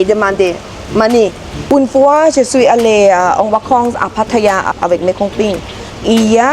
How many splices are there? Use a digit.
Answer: 2